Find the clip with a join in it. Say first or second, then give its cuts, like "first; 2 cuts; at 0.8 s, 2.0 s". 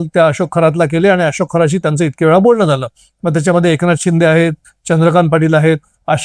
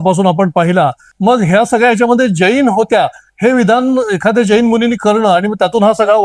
second; 1 cut; at 1.1 s